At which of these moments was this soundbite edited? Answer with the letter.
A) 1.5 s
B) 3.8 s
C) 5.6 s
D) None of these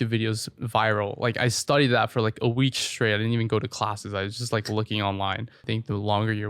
C